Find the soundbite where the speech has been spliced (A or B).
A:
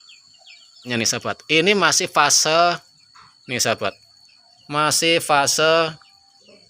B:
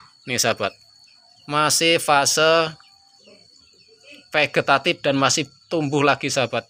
A